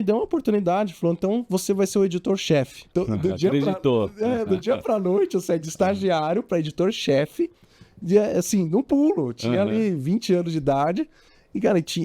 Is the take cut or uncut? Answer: cut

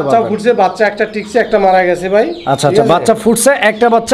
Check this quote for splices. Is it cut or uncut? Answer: uncut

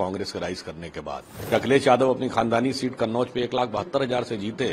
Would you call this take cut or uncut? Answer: cut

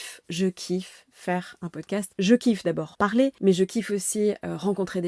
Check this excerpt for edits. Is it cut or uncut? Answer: cut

